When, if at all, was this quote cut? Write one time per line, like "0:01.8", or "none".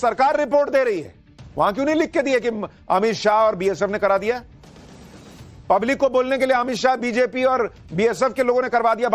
none